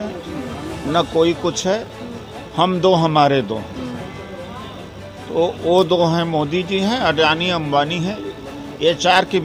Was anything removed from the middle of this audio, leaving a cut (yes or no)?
no